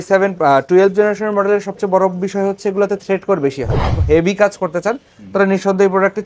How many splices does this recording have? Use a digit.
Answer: 1